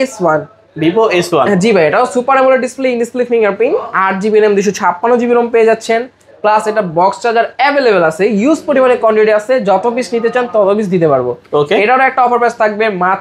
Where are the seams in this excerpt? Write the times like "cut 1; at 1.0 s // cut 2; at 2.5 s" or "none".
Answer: none